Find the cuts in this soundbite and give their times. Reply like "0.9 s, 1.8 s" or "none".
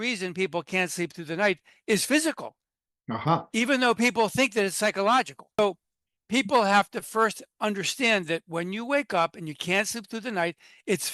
5.6 s